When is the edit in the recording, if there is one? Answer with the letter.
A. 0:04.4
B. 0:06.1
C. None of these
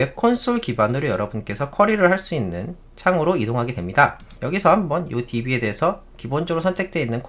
A